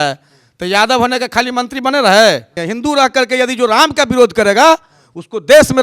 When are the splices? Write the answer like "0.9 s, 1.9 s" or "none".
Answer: 2.5 s